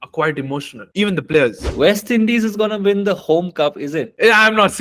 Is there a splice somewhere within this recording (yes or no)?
yes